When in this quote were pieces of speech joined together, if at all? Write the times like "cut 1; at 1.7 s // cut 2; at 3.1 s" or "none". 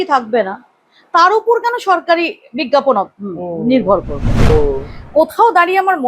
cut 1; at 4.5 s